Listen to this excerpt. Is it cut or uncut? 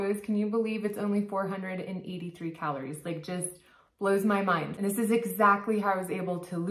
cut